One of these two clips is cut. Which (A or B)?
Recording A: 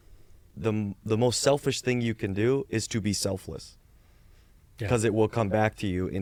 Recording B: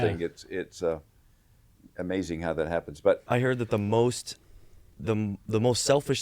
B